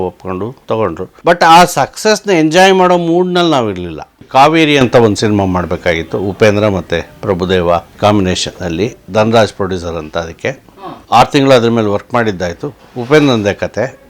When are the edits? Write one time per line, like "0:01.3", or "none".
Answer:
0:04.2